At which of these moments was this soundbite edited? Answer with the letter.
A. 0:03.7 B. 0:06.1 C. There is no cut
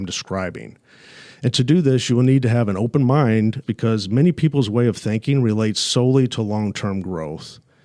A